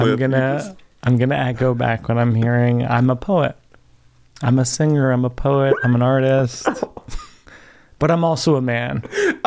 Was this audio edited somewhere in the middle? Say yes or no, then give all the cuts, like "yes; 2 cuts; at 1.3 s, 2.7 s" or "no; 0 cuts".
no; 0 cuts